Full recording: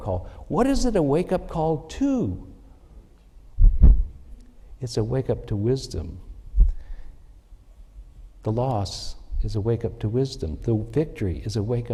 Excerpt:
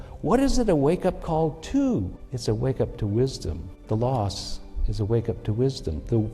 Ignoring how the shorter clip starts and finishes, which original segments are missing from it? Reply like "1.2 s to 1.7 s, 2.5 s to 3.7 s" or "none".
2.5 s to 4.7 s, 6.2 s to 8.2 s